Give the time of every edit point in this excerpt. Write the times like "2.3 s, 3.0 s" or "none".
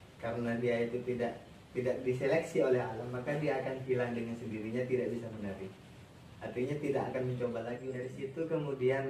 8.1 s